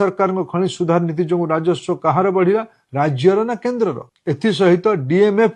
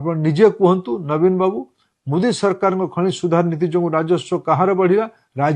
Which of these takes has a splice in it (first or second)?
first